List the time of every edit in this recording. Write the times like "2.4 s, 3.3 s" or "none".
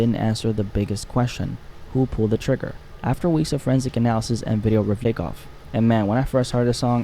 5.0 s